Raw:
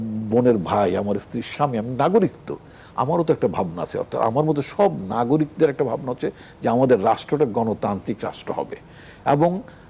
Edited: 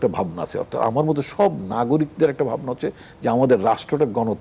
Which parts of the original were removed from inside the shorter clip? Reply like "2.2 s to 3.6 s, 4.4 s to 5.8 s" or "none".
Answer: none